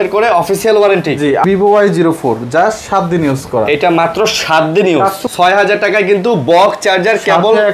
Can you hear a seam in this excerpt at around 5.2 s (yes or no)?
yes